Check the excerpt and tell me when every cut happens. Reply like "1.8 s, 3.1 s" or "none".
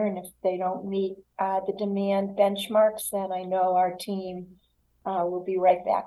none